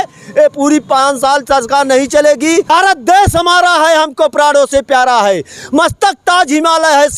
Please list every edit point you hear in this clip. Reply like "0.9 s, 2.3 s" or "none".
2.7 s